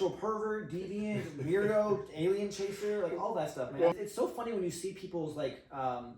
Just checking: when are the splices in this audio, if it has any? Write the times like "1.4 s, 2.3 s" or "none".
3.7 s